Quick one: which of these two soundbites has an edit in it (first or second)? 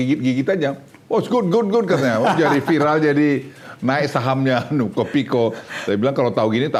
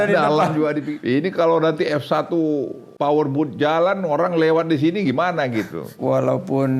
second